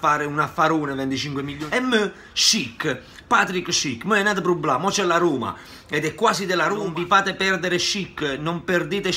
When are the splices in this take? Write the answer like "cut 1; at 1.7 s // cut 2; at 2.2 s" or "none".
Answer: cut 1; at 1.6 s // cut 2; at 6.9 s